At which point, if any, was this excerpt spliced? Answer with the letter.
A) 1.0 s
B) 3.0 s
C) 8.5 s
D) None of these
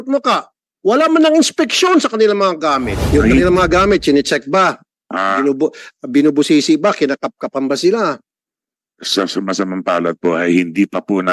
B